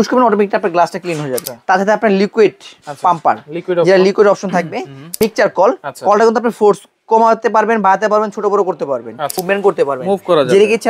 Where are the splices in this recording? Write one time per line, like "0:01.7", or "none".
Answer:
0:01.5
0:05.1
0:09.4